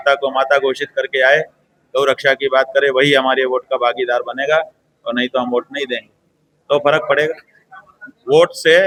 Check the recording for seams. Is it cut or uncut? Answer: uncut